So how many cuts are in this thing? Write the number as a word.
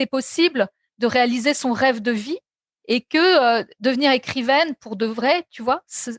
zero